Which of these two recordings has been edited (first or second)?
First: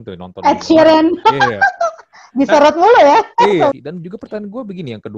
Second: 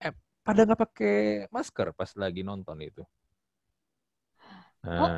first